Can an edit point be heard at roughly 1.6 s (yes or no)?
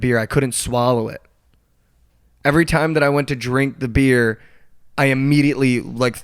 yes